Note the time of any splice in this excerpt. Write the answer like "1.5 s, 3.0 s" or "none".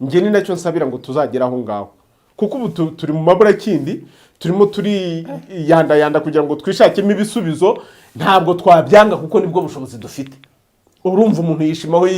none